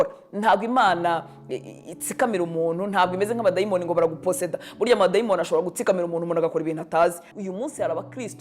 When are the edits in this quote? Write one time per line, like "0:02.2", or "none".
0:07.2